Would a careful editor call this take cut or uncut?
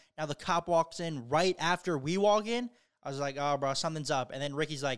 uncut